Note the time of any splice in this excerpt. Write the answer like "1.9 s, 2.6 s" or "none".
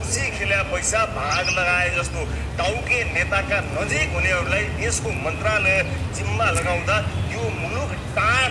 none